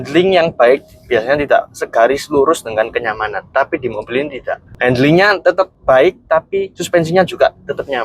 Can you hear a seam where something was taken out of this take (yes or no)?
yes